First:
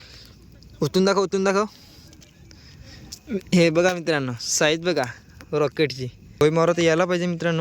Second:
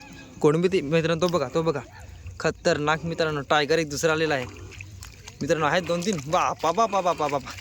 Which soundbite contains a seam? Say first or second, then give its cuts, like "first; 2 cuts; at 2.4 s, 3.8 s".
first; 1 cut; at 6.4 s